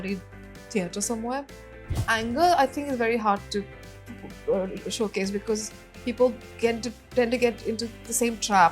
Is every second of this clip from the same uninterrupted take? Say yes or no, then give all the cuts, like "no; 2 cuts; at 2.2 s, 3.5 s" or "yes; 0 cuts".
no; 1 cut; at 2.1 s